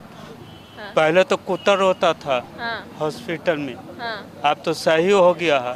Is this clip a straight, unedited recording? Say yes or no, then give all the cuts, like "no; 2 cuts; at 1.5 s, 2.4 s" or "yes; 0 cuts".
yes; 0 cuts